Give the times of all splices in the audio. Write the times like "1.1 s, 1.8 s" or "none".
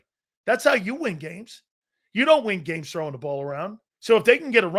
3.9 s